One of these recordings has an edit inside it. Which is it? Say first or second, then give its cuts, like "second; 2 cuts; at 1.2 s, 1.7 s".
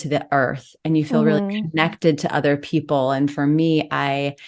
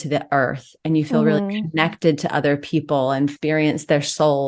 second; 1 cut; at 3.3 s